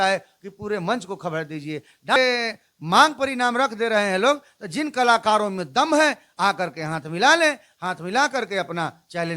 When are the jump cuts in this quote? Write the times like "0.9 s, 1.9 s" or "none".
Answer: 2.2 s